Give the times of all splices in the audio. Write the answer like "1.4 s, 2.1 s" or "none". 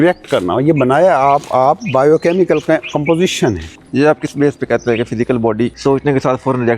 5.8 s